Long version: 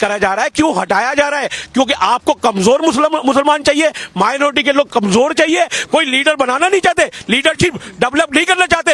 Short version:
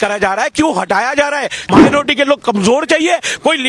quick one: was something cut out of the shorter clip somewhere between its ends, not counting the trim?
yes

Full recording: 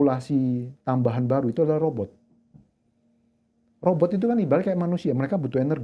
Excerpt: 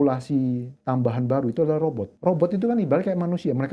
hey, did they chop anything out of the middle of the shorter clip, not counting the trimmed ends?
yes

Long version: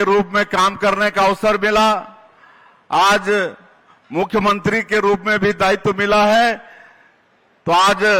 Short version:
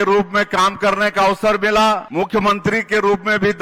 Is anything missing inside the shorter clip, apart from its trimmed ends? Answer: yes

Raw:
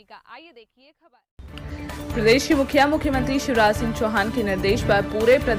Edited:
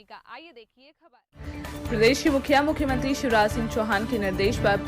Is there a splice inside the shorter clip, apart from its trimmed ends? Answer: yes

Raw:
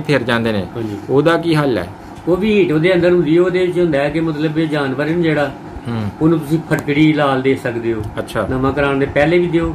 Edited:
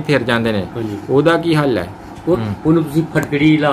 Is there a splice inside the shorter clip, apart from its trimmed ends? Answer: yes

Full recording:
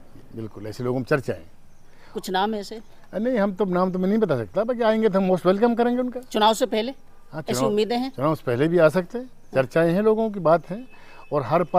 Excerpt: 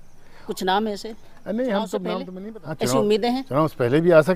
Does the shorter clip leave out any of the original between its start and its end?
yes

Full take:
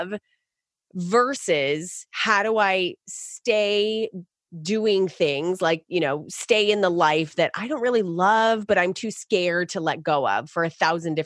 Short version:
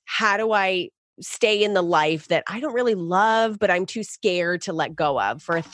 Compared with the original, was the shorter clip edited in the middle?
yes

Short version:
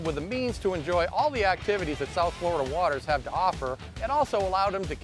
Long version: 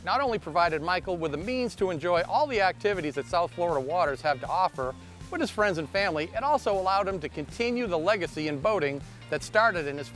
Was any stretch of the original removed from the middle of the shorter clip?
yes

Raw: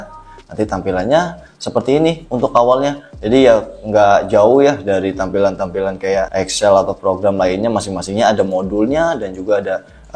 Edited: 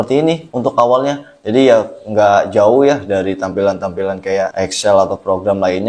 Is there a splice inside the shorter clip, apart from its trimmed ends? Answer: no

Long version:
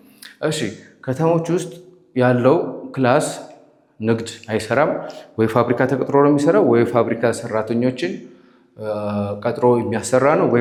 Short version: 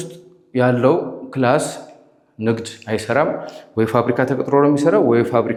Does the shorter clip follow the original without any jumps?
yes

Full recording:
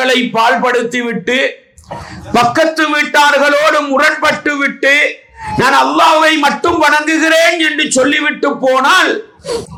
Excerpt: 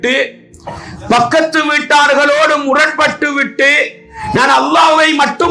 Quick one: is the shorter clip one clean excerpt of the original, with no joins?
yes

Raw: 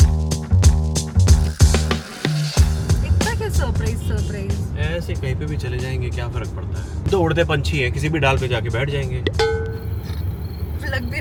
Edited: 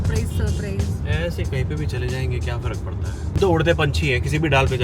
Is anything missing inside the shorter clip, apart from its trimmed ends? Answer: no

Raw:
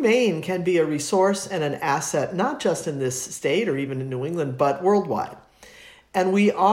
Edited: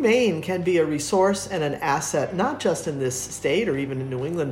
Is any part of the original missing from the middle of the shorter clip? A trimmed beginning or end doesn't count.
no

